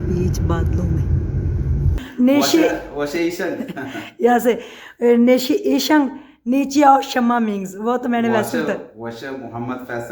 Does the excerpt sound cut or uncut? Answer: cut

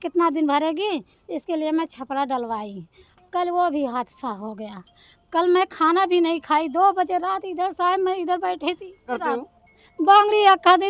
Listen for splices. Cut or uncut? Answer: cut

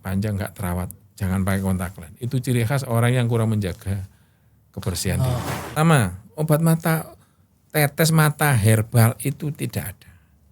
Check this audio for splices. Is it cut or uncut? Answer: cut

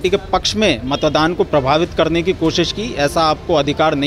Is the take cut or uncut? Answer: uncut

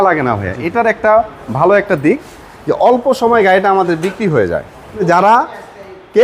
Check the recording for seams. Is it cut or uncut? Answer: cut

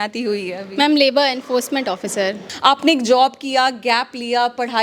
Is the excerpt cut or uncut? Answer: cut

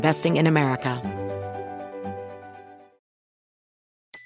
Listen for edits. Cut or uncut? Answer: cut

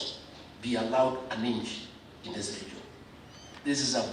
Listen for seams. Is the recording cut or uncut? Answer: uncut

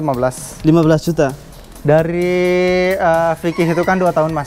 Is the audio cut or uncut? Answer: cut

